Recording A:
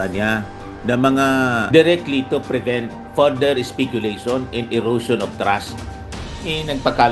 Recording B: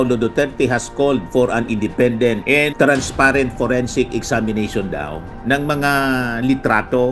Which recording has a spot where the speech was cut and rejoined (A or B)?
A